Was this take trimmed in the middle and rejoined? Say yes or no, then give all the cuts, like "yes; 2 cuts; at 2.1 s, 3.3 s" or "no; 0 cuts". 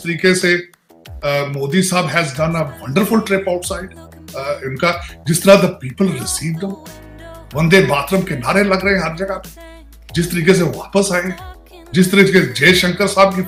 no; 0 cuts